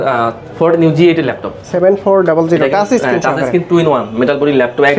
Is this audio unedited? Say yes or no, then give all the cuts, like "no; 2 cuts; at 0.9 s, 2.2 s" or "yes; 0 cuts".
no; 1 cut; at 1.6 s